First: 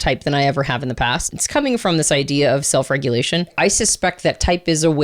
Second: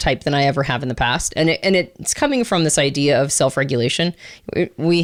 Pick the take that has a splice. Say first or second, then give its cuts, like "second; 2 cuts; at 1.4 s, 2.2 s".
first; 2 cuts; at 1.3 s, 3.5 s